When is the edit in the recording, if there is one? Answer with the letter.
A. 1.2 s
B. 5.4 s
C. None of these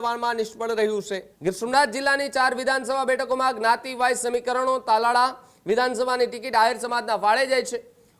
A